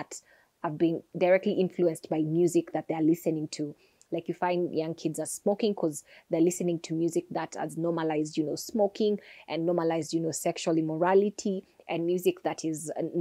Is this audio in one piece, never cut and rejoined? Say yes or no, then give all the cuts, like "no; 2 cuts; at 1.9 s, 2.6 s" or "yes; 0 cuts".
yes; 0 cuts